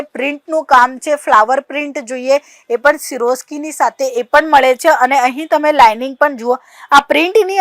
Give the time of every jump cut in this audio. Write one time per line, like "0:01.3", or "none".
none